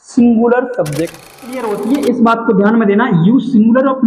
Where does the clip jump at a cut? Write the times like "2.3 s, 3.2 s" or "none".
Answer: 1.4 s